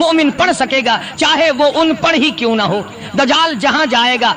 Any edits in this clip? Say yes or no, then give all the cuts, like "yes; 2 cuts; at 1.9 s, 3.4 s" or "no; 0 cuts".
no; 0 cuts